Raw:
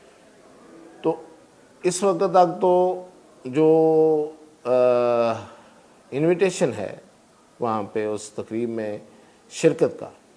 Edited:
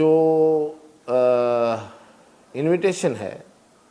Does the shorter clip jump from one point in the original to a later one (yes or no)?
no